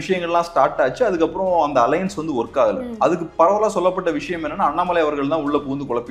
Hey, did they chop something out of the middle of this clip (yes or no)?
no